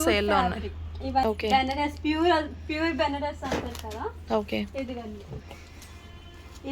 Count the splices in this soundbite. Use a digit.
1